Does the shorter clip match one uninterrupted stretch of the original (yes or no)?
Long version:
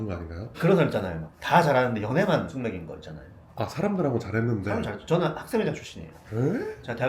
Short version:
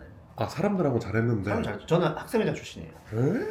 yes